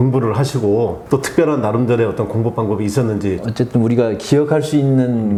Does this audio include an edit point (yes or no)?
no